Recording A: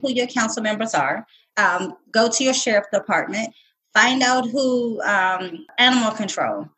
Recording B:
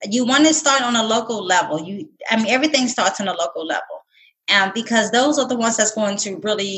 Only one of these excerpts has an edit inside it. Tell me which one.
A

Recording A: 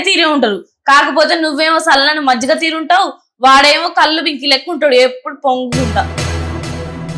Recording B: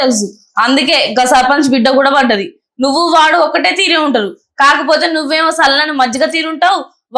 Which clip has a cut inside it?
A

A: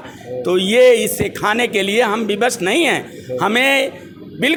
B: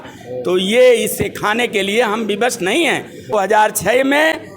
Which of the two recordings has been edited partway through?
B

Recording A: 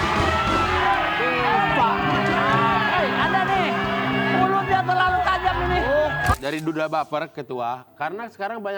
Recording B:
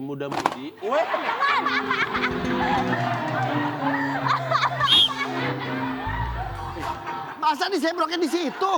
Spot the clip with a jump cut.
A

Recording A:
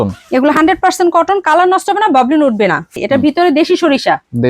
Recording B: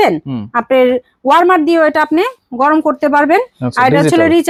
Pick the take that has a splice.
A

